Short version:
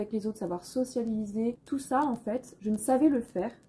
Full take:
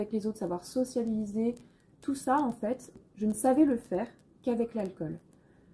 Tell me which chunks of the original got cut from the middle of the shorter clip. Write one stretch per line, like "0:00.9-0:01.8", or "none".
0:01.6-0:02.0
0:02.9-0:03.1